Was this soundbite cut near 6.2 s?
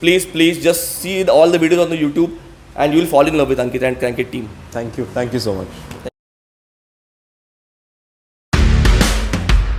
no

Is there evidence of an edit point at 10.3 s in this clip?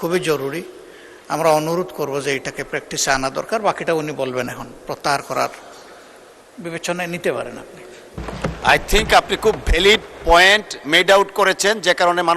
no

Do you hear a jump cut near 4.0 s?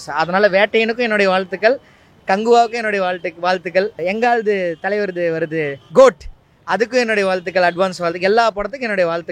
yes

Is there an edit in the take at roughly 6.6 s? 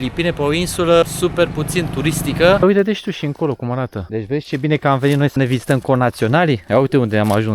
no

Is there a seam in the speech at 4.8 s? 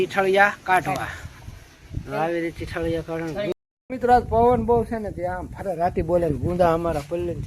no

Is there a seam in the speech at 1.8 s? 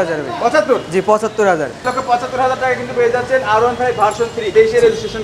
yes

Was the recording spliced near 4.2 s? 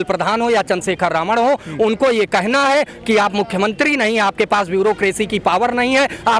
no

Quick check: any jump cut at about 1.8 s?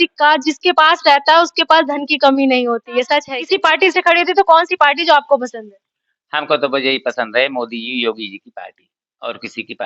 no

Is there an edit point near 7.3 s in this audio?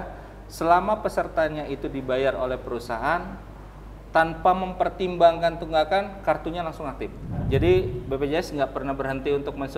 yes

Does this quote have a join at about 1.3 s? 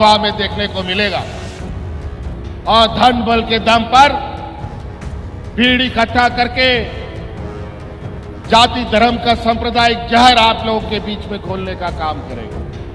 no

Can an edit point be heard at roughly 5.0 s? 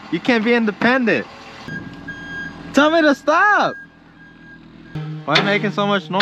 yes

